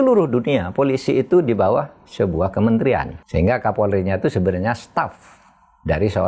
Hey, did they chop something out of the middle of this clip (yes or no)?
yes